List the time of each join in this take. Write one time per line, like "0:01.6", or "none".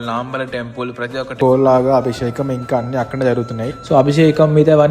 0:01.3